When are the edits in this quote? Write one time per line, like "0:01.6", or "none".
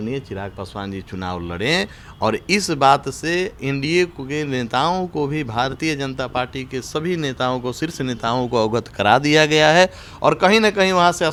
none